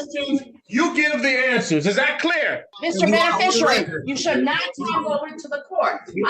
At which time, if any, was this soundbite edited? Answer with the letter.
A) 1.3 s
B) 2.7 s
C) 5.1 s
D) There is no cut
B